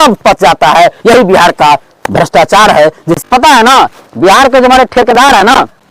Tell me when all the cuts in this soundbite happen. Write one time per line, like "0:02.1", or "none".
0:03.1